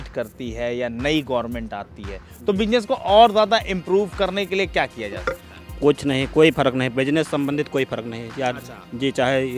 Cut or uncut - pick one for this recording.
uncut